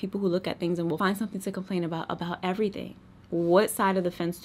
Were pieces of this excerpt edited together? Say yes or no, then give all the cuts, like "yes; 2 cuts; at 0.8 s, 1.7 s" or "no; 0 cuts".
no; 0 cuts